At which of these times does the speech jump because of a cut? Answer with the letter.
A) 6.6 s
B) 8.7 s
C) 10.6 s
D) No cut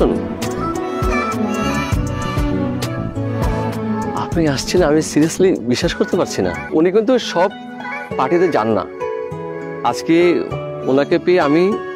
A